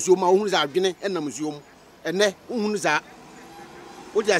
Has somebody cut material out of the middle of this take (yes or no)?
no